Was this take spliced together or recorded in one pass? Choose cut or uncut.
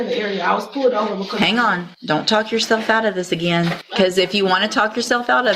cut